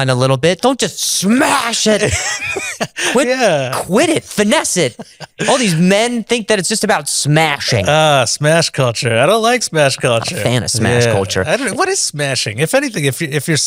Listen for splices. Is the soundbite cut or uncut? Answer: uncut